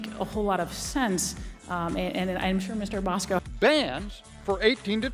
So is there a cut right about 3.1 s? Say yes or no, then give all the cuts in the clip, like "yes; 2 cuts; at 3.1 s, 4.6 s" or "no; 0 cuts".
no; 0 cuts